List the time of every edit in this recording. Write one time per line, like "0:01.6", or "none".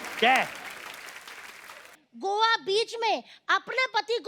0:01.9